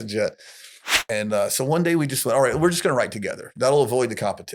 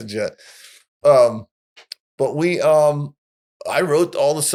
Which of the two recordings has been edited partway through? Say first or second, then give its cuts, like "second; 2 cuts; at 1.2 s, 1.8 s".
first; 1 cut; at 0.9 s